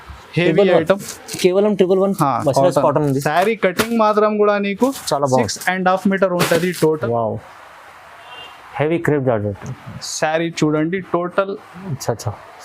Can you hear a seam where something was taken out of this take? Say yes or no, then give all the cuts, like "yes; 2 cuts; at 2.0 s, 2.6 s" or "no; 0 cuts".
yes; 1 cut; at 7.0 s